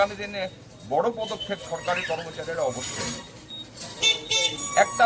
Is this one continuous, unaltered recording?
no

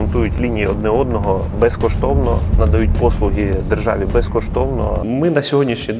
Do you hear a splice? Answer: yes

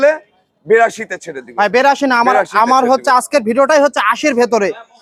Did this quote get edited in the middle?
no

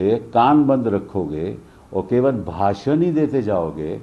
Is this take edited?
no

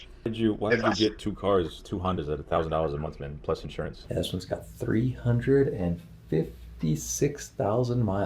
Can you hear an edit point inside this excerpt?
yes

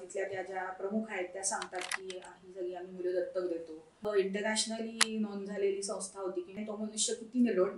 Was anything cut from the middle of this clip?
yes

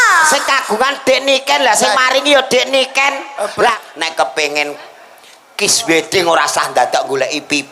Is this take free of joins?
no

